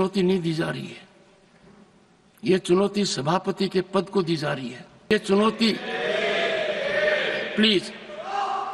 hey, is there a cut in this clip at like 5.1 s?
yes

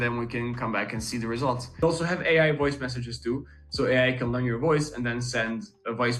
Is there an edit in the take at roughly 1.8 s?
yes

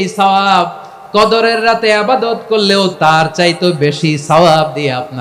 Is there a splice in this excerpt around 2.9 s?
yes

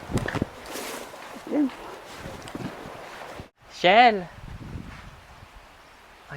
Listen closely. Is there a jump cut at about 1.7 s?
no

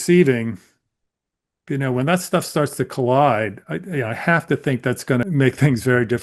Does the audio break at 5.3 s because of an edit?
yes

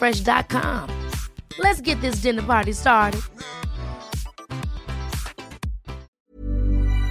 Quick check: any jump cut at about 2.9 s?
no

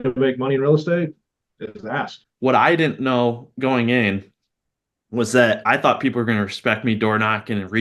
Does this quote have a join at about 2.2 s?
yes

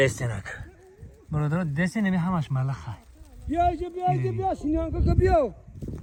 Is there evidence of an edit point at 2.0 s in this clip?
no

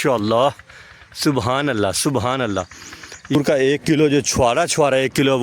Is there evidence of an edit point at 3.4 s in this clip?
yes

